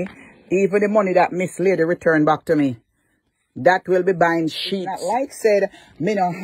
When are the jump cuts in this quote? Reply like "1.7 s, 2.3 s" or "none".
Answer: 4.9 s